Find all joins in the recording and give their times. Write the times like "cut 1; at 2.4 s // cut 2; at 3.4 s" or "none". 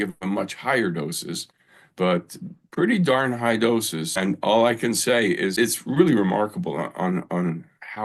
cut 1; at 4.1 s // cut 2; at 5.5 s

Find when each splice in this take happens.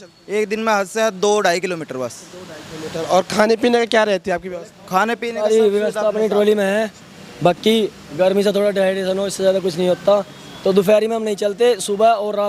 none

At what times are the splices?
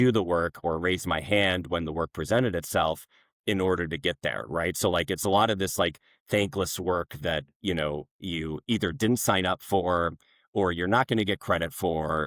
none

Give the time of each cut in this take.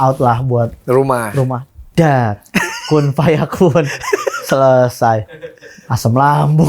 cut 1; at 1.6 s

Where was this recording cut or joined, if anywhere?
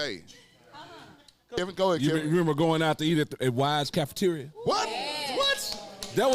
cut 1; at 1.6 s

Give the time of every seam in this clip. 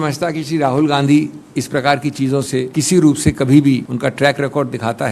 cut 1; at 2.7 s // cut 2; at 3.9 s

